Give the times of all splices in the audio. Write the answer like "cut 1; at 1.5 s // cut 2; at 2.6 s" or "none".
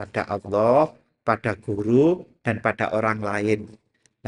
none